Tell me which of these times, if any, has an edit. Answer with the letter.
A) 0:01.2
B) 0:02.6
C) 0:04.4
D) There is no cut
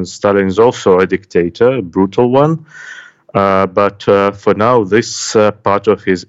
D